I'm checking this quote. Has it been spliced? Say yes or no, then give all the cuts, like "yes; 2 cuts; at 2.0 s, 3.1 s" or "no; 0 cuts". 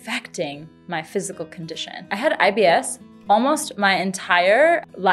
yes; 1 cut; at 1.9 s